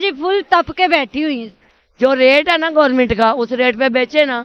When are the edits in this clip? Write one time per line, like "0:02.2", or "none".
none

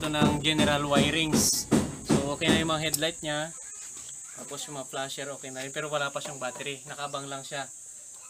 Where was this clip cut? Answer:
none

